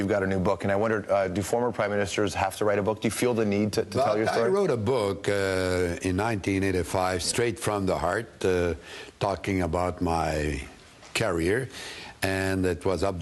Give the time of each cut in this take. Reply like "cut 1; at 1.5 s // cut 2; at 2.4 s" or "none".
cut 1; at 10.5 s